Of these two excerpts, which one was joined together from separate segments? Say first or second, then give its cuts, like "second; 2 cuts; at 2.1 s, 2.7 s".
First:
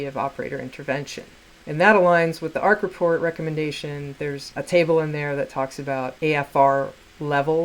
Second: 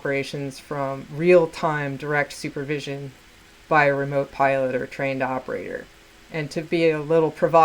first; 2 cuts; at 4.4 s, 6.1 s